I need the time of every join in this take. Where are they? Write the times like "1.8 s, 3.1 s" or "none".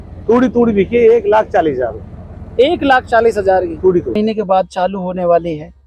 4.2 s